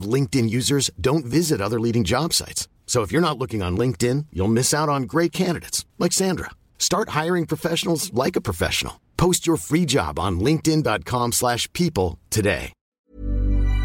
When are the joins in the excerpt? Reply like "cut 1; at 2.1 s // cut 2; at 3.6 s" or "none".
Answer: cut 1; at 12.9 s